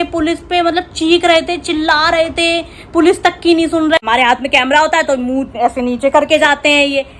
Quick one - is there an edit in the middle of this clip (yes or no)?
yes